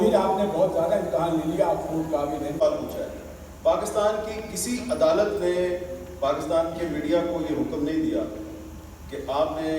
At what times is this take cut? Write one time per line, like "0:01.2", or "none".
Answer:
0:02.6